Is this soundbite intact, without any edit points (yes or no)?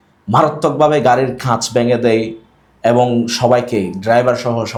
yes